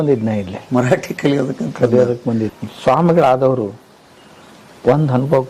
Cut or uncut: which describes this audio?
cut